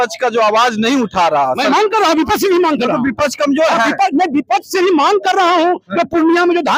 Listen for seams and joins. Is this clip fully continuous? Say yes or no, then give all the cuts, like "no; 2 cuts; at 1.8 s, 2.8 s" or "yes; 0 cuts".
yes; 0 cuts